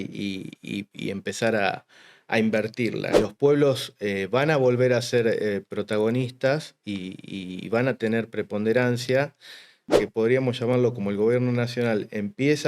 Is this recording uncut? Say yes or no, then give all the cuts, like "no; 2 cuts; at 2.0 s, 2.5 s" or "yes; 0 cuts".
no; 2 cuts; at 3.1 s, 9.9 s